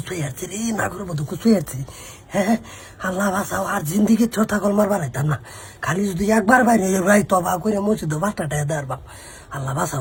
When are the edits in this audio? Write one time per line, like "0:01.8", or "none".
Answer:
none